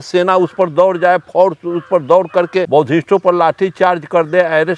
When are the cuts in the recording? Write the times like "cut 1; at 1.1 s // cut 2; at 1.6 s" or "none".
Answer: cut 1; at 2.7 s